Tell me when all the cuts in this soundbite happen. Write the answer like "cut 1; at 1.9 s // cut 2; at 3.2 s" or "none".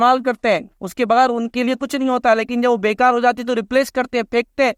none